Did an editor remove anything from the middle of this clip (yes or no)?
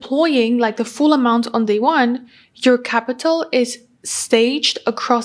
no